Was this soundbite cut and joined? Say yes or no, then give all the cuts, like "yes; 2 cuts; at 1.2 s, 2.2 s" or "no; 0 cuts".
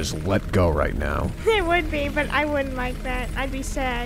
yes; 1 cut; at 1.3 s